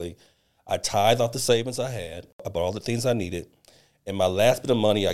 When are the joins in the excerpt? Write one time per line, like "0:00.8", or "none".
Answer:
0:02.5

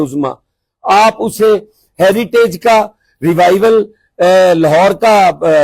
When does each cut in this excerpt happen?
none

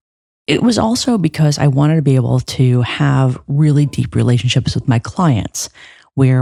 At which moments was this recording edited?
none

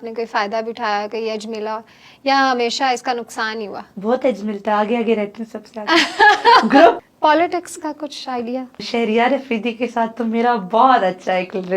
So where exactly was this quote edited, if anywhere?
0:07.0
0:08.9

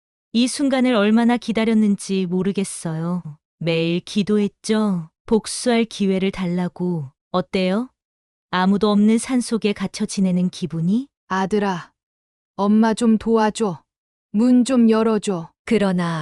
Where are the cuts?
0:11.2

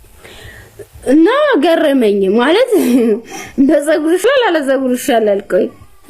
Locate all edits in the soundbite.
0:04.2

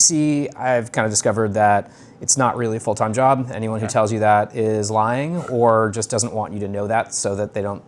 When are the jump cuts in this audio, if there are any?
none

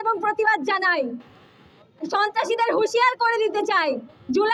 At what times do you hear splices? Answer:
none

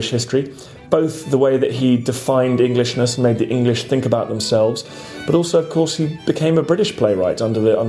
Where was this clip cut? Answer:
none

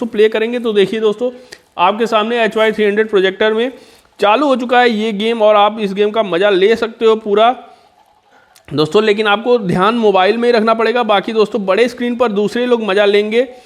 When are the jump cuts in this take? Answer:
none

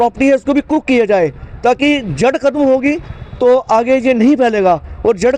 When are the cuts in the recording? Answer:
none

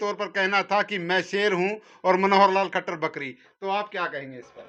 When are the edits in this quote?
none

